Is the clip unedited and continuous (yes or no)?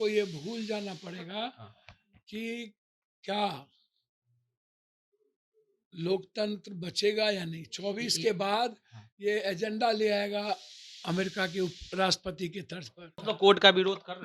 no